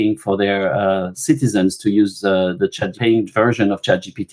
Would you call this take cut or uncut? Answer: cut